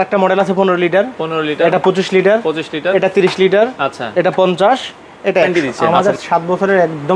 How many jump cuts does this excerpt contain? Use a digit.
1